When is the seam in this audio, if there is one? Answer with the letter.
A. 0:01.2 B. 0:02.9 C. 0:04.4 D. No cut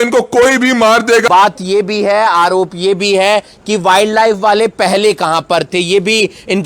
A